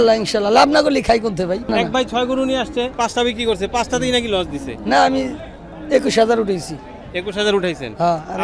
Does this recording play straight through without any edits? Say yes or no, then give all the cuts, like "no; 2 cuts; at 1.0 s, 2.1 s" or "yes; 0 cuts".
no; 2 cuts; at 1.7 s, 2.9 s